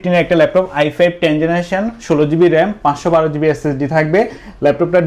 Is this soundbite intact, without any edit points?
yes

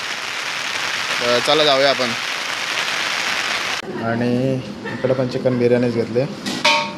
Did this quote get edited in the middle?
yes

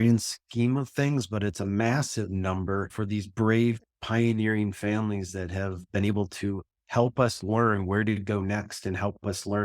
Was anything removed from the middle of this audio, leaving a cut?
no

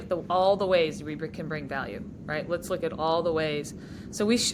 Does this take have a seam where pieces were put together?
no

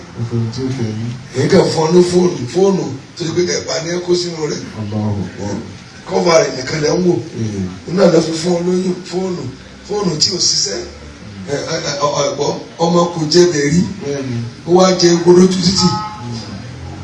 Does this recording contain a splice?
no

